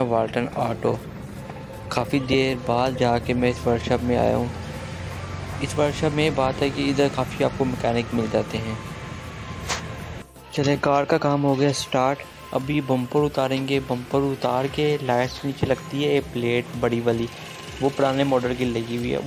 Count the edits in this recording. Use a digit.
0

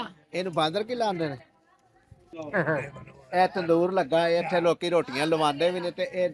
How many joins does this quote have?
1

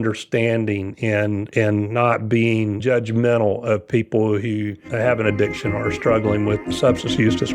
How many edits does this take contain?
2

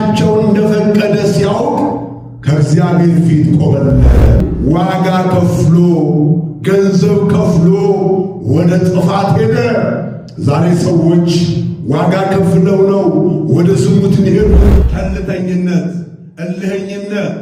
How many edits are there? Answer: 2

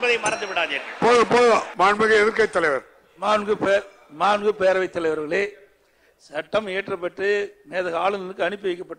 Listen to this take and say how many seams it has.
1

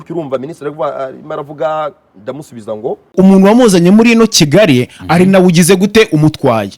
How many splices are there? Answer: 1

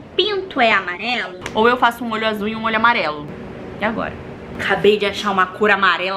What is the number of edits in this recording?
2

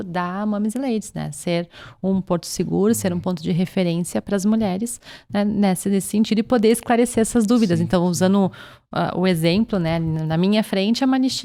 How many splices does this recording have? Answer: 0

